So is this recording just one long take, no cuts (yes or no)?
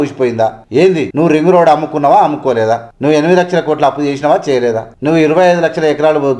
no